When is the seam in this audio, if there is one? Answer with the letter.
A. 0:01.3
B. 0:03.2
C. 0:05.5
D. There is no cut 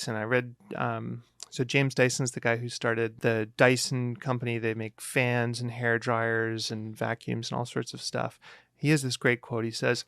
B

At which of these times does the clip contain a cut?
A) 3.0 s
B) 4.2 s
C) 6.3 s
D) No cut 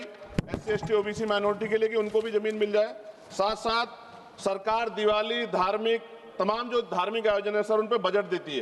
D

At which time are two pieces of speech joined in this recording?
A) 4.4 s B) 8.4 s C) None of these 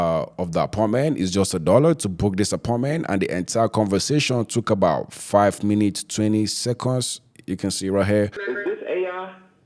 B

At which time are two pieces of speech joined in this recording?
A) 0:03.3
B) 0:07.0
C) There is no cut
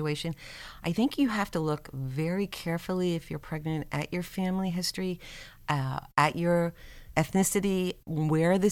B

